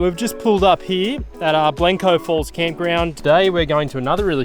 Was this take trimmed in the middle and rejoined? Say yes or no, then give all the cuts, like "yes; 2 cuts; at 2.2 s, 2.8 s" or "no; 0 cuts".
yes; 1 cut; at 3.2 s